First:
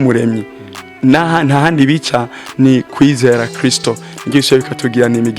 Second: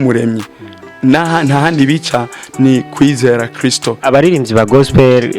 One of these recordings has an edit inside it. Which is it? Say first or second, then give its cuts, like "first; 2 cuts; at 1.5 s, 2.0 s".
second; 1 cut; at 4.0 s